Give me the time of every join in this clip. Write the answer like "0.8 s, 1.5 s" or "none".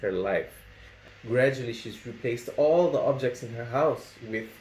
1.0 s

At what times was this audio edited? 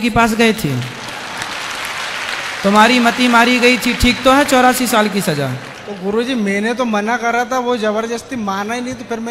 none

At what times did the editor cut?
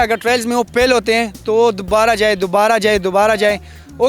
none

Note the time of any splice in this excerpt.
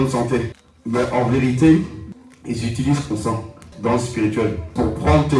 none

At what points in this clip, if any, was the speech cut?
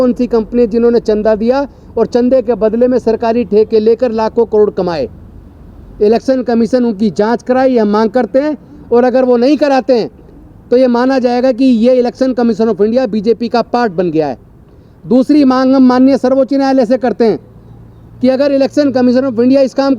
none

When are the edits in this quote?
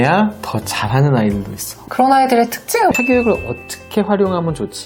1.8 s, 2.9 s

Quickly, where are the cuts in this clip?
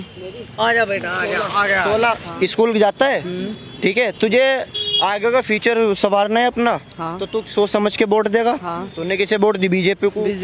none

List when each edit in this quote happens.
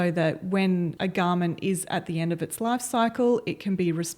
0.9 s

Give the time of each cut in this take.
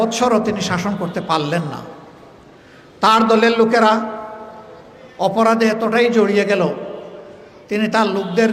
none

